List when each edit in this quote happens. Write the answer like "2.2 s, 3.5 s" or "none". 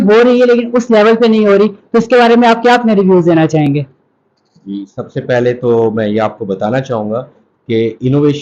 none